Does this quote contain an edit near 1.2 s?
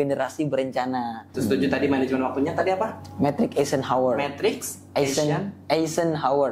yes; 1 cut; at 1.2 s

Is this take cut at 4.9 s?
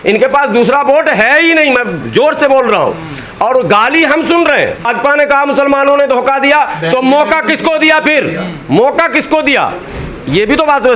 yes; 1 cut; at 4.9 s

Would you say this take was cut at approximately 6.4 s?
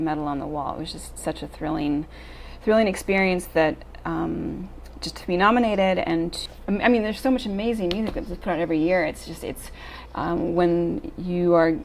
yes; 1 cut; at 6.4 s

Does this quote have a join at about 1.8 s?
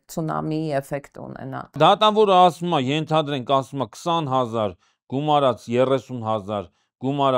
yes; 1 cut; at 1.8 s

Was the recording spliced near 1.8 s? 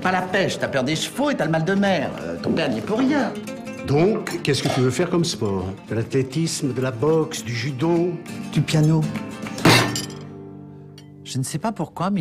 yes; 1 cut; at 1.8 s

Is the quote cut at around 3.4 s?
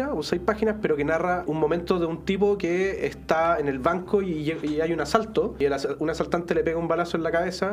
no; 2 cuts; at 1.5 s, 5.6 s

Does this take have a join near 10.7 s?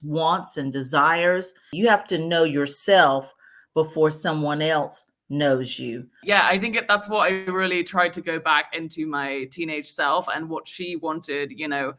no; 2 cuts; at 1.7 s, 6.2 s

